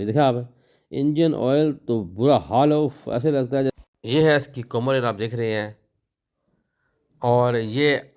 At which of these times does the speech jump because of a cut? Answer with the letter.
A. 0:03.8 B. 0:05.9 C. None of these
A